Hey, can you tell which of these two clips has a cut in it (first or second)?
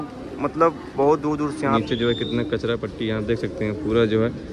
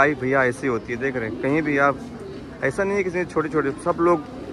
first